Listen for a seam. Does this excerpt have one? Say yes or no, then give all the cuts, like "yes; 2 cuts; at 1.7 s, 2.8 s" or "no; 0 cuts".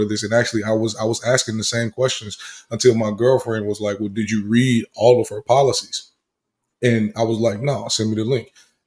no; 0 cuts